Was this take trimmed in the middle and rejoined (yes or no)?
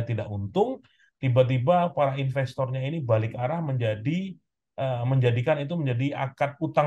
no